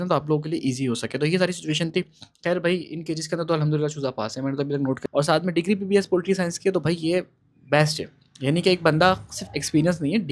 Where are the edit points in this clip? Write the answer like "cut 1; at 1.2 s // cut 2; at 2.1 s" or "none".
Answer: cut 1; at 5.0 s